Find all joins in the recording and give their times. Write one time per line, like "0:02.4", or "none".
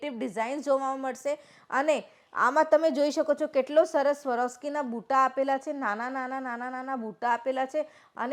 none